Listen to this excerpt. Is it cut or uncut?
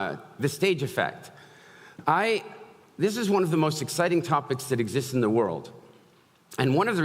uncut